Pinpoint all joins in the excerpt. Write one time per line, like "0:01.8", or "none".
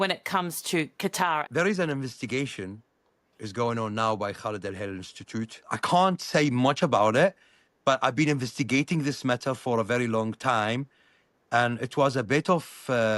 0:01.5
0:05.6